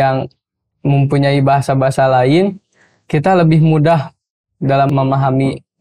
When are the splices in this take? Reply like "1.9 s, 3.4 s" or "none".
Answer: 4.9 s